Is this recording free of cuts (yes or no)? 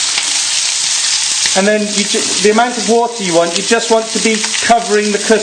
yes